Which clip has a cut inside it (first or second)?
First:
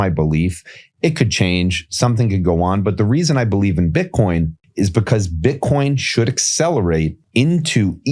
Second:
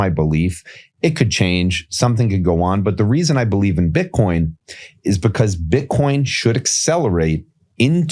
first